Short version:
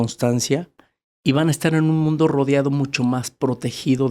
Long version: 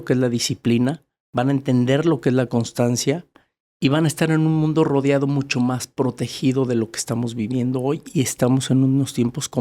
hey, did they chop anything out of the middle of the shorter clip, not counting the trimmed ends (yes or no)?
no